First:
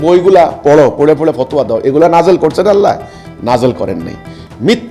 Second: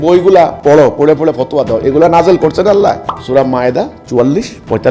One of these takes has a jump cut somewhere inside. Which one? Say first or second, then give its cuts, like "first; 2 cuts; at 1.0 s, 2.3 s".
second; 1 cut; at 3.1 s